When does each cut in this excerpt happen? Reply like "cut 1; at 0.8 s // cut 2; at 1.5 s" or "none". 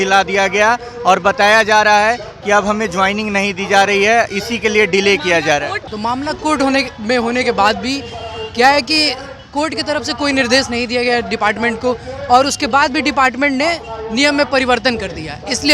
cut 1; at 5.8 s